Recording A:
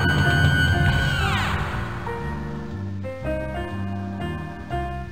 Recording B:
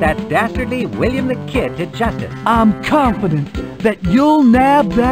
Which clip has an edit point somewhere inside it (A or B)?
B